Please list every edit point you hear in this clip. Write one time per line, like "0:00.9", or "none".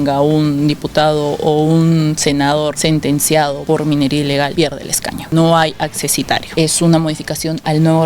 0:02.8
0:03.6
0:04.6
0:06.5